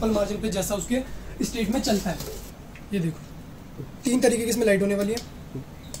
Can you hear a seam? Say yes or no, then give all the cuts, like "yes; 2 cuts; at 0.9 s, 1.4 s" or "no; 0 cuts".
yes; 1 cut; at 2.3 s